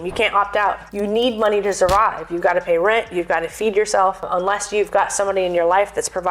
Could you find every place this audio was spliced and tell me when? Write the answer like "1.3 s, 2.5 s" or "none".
1.1 s, 4.3 s